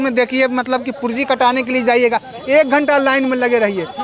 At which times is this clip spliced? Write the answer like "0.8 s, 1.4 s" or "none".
none